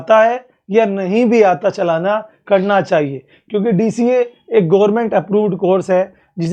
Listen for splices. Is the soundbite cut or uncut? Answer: uncut